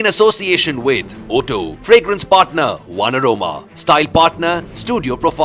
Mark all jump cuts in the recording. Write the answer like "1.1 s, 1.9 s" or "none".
none